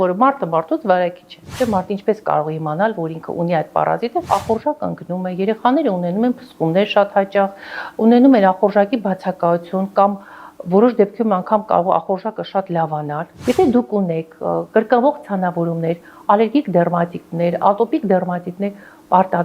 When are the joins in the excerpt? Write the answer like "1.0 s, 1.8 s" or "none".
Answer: 1.5 s, 4.2 s, 13.3 s